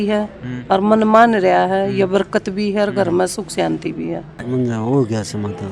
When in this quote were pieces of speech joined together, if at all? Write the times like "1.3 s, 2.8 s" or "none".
4.5 s